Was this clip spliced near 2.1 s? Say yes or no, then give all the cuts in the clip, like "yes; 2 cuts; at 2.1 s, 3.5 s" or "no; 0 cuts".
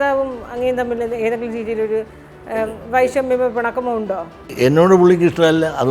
no; 1 cut; at 4.5 s